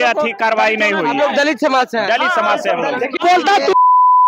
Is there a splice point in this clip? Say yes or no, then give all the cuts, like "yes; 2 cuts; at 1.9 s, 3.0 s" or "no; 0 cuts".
yes; 1 cut; at 3.2 s